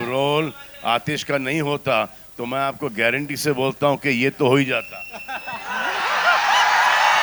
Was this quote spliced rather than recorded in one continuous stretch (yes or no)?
no